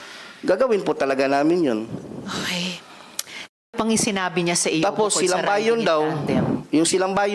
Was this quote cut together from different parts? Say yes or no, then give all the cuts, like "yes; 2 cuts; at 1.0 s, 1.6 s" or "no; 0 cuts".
yes; 1 cut; at 3.7 s